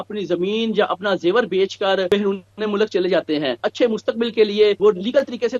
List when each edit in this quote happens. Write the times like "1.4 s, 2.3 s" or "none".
2.1 s, 3.6 s, 4.8 s